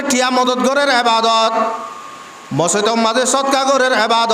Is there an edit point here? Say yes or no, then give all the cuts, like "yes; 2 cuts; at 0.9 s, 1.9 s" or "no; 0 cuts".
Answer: no; 0 cuts